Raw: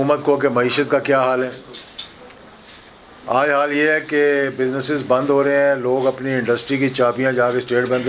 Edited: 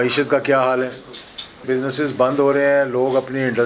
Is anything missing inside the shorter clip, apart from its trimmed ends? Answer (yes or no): yes